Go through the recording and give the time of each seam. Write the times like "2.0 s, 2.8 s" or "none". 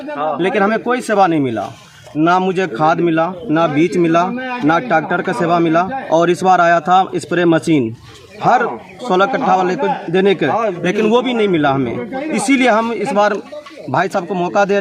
none